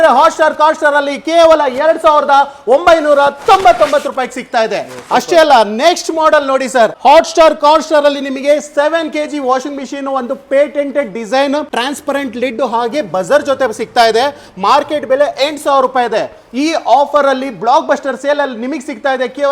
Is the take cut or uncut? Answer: uncut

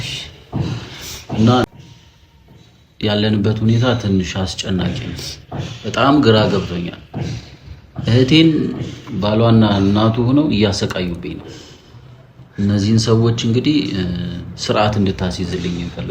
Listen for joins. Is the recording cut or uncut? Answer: cut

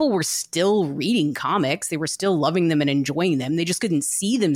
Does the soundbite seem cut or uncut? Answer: uncut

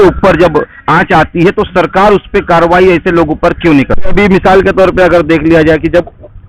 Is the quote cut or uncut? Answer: cut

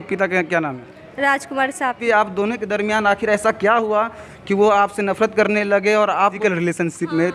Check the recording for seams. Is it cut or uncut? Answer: cut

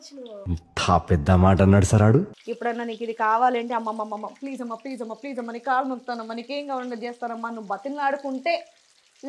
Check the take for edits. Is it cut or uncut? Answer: cut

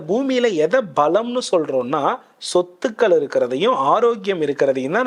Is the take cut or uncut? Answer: uncut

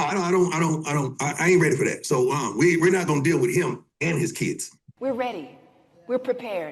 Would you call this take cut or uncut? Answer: cut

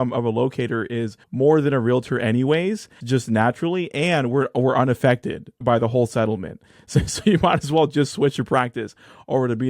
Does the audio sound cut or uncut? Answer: cut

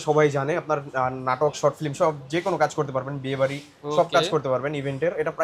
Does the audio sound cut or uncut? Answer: uncut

